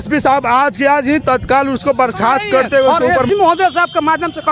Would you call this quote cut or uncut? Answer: cut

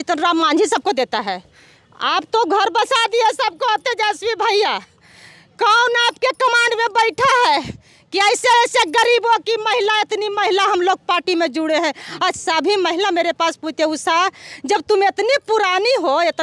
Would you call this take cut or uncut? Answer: uncut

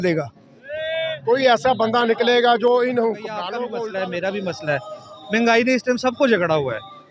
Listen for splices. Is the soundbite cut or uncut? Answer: cut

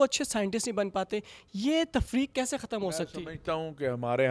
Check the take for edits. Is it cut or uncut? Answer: uncut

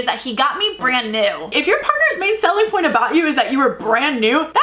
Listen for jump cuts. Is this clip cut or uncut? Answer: cut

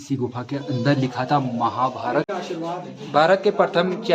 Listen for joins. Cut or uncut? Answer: cut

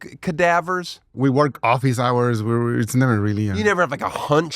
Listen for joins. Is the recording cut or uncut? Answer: cut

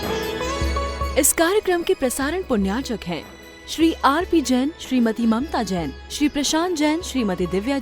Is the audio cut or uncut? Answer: cut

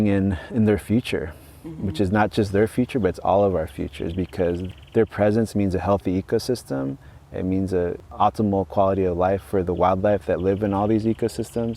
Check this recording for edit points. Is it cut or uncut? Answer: cut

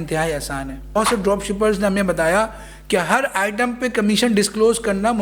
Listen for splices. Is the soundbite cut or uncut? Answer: cut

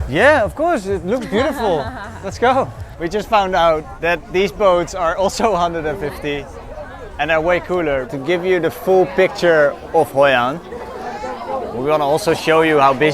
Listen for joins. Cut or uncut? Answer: cut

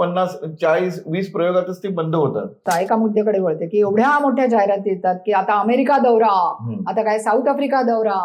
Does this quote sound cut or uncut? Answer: cut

